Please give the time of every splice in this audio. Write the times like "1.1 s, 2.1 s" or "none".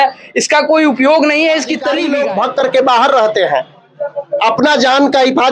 2.0 s